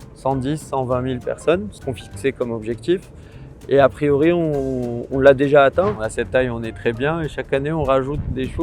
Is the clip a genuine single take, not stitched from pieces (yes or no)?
no